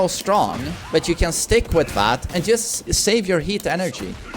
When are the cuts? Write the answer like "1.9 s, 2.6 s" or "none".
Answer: 2.9 s